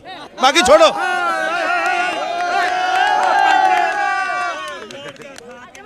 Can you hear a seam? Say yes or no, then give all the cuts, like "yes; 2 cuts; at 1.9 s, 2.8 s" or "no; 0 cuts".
no; 0 cuts